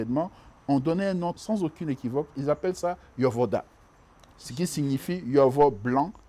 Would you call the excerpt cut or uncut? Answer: cut